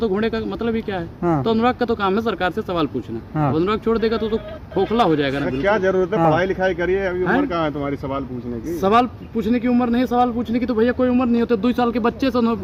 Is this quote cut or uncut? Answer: uncut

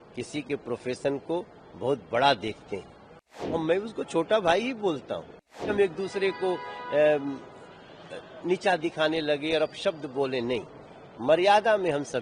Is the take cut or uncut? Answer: cut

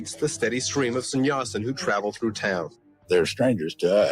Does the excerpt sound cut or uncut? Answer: cut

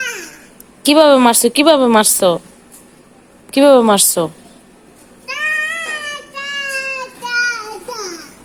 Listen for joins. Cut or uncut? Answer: uncut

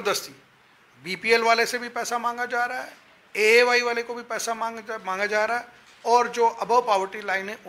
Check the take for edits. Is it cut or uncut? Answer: uncut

